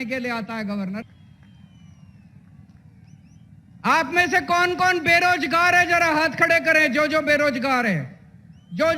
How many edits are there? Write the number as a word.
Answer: one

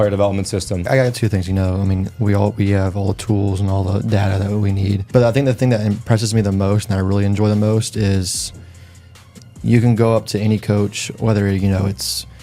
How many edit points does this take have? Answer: two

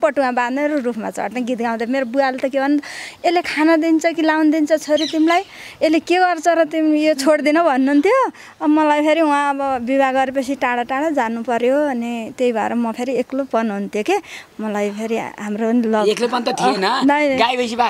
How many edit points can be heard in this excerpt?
zero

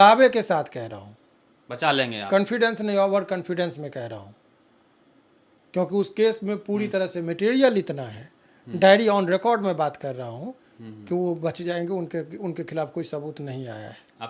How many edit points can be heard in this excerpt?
zero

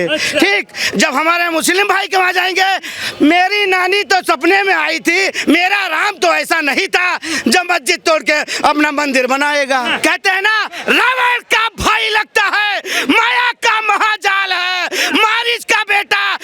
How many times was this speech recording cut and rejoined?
one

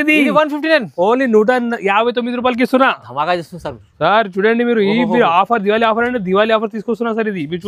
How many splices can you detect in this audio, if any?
zero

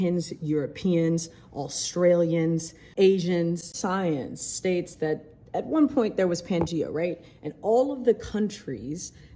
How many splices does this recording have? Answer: zero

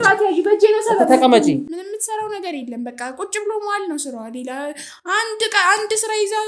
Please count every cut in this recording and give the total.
one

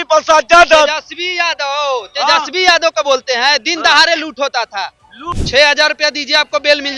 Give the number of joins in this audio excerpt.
one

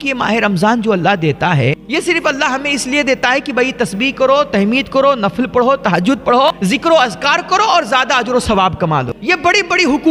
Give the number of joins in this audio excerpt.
three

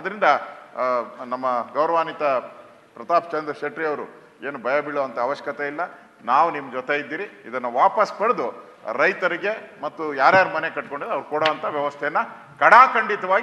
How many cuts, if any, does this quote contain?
zero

